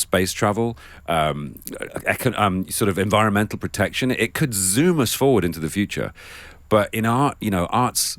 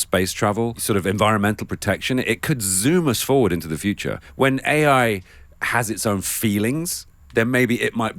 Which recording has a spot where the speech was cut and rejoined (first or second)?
second